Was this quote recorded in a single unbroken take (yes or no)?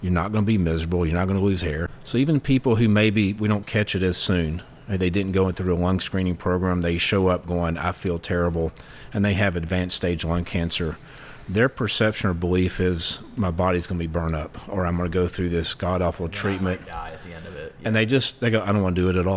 no